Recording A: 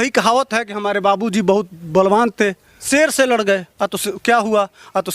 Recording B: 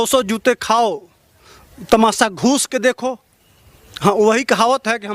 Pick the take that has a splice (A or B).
A